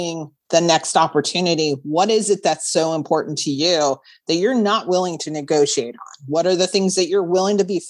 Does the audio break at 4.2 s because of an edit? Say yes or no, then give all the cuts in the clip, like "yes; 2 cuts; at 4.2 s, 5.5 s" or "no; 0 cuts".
no; 0 cuts